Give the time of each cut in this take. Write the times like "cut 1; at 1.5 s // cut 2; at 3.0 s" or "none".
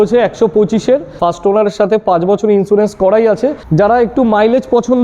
cut 1; at 1.1 s // cut 2; at 3.7 s